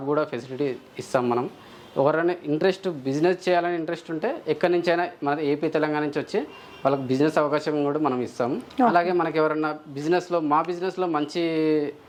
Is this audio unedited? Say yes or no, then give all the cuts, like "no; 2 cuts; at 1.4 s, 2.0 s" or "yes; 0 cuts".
yes; 0 cuts